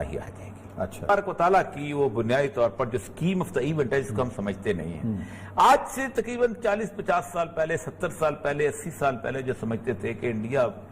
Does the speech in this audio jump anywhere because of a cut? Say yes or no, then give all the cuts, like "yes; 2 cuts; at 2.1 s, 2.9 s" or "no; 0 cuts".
yes; 1 cut; at 1.1 s